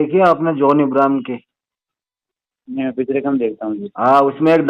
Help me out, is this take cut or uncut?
uncut